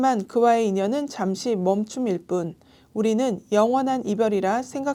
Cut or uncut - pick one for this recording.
uncut